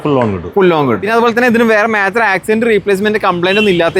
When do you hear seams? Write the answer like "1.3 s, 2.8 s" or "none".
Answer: 1.0 s